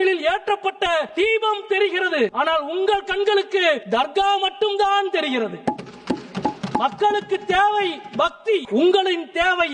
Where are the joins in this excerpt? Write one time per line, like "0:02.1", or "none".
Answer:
0:01.1
0:02.3
0:03.8
0:08.7